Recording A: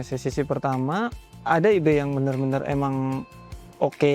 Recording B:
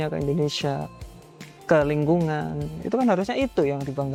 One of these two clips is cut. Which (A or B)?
A